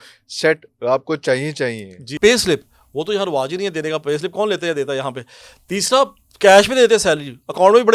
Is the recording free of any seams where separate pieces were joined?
no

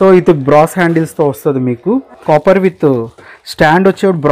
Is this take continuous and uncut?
no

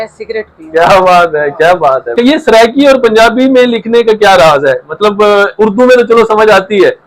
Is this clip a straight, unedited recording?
no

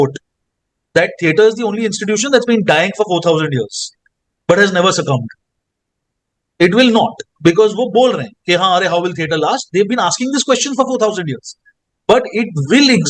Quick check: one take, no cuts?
yes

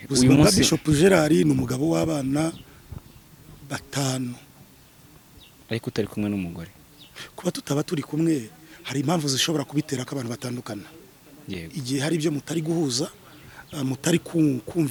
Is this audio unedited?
yes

